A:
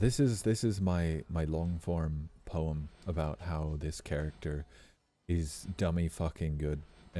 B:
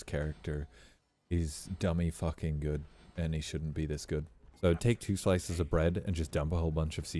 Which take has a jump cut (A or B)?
B